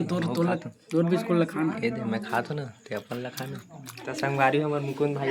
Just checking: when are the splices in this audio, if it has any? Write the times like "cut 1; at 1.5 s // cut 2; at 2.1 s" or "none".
cut 1; at 3.9 s